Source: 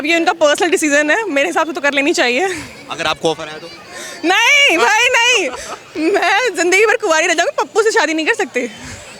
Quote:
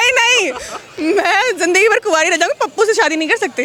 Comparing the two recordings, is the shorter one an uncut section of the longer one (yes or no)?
yes